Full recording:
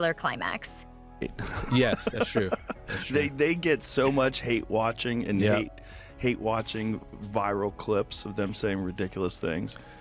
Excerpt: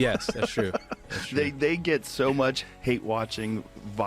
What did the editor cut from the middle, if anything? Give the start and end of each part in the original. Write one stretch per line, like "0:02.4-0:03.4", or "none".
0:04.4-0:06.0